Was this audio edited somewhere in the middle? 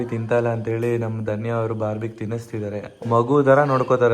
yes; 1 cut; at 2.9 s

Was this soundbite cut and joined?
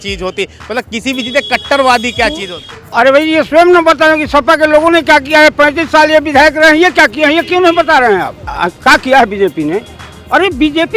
yes; 2 cuts; at 2.6 s, 8.5 s

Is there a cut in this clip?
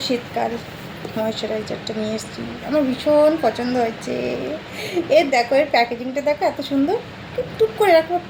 no; 0 cuts

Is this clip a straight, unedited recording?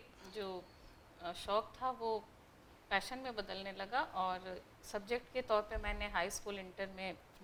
yes; 0 cuts

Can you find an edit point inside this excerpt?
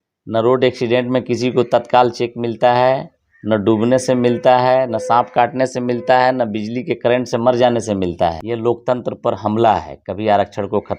yes; 1 cut; at 8.4 s

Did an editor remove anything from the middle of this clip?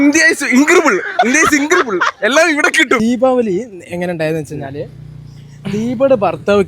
yes; 1 cut; at 3.0 s

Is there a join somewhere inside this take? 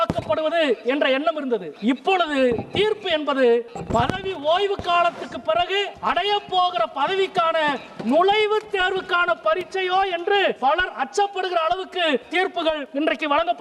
yes; 5 cuts; at 1.7 s, 3.8 s, 5.9 s, 10.6 s, 12.6 s

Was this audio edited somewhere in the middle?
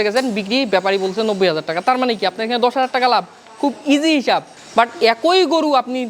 no; 0 cuts

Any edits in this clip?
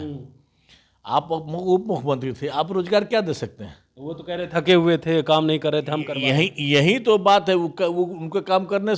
no; 0 cuts

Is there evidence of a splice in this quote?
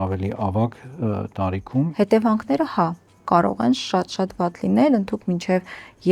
yes; 1 cut; at 1.9 s

